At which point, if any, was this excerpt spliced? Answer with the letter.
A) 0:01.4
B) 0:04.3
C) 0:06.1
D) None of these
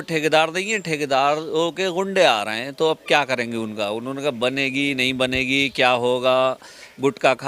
D